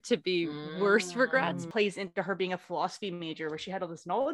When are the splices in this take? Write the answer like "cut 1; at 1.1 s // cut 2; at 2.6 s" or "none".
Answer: cut 1; at 1.6 s